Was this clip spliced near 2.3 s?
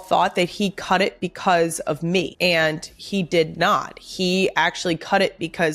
yes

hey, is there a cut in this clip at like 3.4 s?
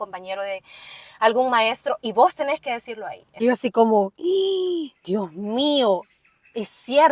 yes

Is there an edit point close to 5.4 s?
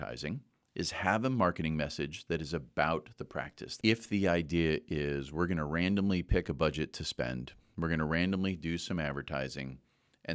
no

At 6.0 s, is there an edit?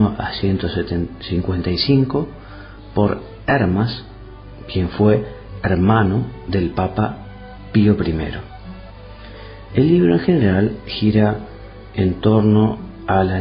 yes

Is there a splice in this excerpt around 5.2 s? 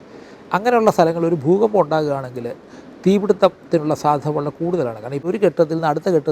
yes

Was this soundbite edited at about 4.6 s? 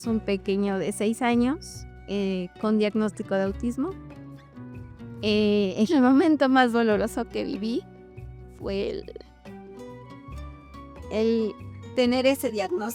yes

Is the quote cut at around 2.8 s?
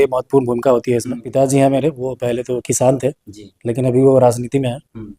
no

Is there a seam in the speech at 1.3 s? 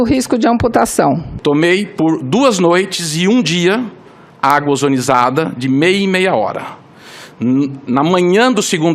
yes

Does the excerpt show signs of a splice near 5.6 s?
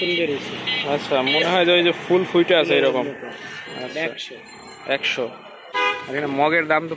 yes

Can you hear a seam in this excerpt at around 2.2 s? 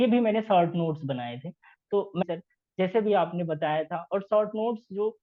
yes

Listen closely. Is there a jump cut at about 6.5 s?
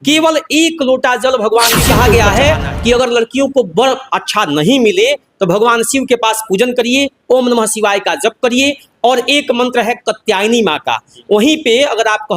no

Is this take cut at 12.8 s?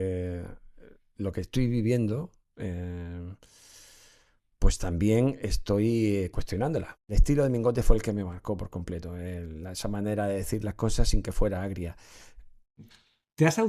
yes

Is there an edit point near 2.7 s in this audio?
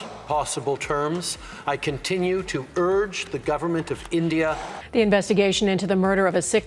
no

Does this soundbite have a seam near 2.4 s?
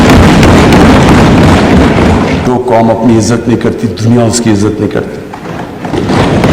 yes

